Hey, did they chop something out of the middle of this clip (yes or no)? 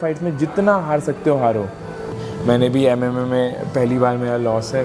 yes